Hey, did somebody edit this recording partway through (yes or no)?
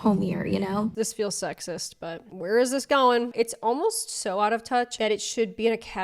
yes